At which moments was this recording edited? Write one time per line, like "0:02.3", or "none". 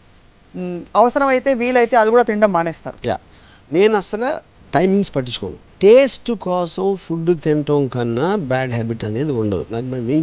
0:05.7